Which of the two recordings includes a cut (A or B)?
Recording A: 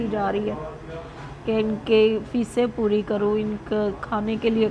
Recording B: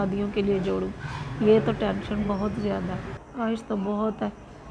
B